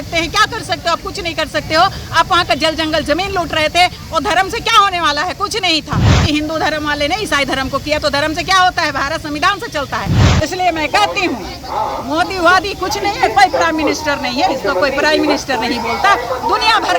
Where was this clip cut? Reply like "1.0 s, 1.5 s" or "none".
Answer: 6.2 s, 10.2 s